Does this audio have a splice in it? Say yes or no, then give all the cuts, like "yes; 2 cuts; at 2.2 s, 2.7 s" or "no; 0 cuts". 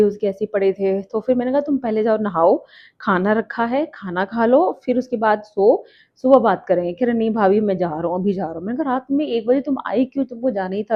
no; 0 cuts